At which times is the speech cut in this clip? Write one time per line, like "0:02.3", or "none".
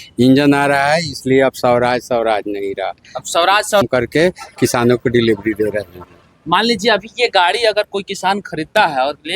0:03.9